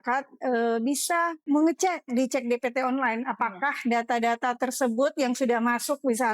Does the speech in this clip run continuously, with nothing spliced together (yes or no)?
no